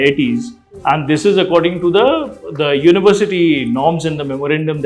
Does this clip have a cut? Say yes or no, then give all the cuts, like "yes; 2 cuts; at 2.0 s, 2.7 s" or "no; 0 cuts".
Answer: no; 0 cuts